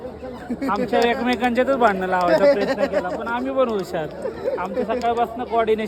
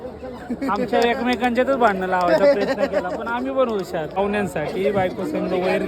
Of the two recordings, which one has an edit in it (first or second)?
second